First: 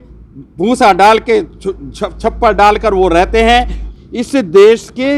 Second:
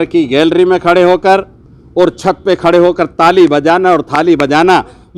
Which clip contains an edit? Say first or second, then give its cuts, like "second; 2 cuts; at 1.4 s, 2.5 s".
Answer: first; 1 cut; at 3.8 s